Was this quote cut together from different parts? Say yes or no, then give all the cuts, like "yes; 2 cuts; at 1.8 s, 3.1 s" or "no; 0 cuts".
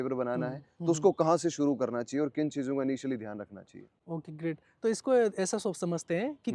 no; 0 cuts